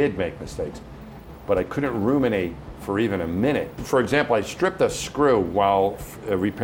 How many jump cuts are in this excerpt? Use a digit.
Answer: 1